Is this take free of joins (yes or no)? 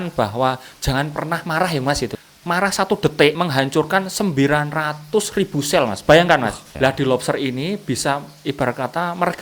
no